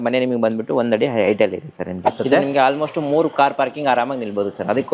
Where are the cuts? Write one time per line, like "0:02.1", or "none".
0:02.1